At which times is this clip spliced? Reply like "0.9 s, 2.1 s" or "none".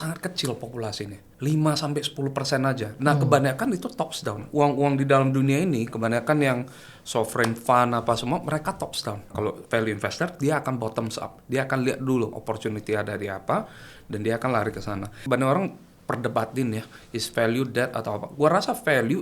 1.2 s, 9.3 s, 15.2 s